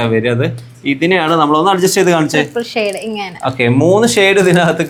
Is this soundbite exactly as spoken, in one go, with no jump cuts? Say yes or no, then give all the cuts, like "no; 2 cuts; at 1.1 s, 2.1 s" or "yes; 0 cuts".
yes; 0 cuts